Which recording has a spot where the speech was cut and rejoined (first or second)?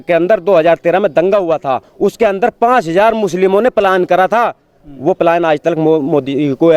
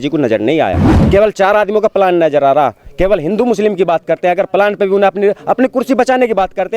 second